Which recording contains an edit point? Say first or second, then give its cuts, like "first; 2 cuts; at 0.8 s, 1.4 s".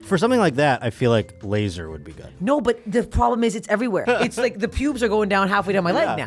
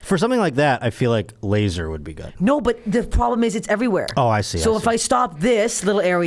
first; 1 cut; at 4.0 s